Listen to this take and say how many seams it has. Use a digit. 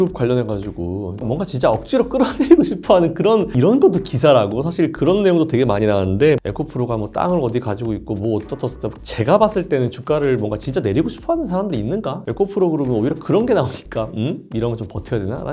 5